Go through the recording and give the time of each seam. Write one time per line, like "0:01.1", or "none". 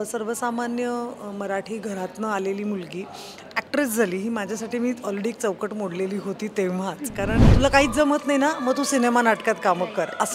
0:07.5

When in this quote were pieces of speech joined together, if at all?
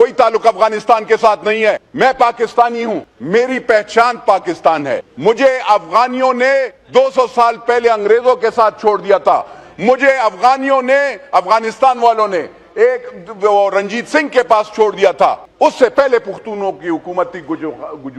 0:01.9
0:03.1
0:05.1
0:06.8
0:15.5

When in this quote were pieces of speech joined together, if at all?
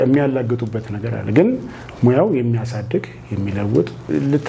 none

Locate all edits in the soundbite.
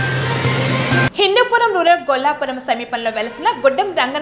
0:01.1

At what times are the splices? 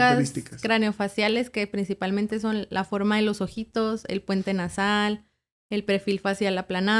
none

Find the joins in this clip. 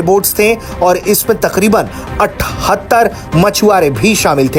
none

